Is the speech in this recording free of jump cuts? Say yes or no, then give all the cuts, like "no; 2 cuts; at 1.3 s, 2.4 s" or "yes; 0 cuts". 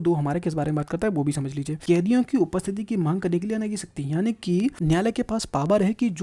no; 2 cuts; at 1.7 s, 4.8 s